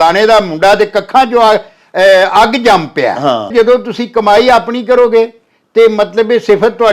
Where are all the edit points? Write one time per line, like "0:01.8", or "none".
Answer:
0:03.5